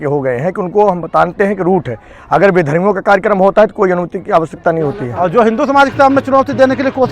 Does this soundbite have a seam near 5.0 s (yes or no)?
yes